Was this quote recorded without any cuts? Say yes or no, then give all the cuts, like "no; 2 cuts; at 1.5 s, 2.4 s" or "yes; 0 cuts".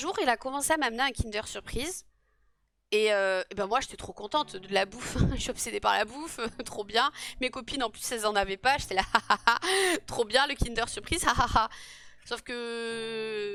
yes; 0 cuts